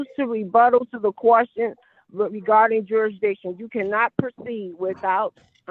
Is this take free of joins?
yes; 0 cuts

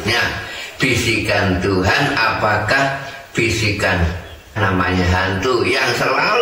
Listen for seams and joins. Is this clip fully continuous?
no; 1 cut; at 4.6 s

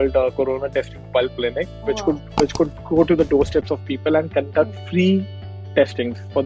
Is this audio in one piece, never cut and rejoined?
yes; 0 cuts

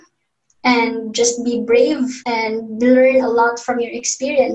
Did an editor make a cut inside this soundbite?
yes; 1 cut; at 2.2 s

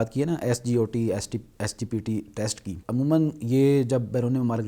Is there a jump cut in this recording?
yes; 1 cut; at 2.8 s

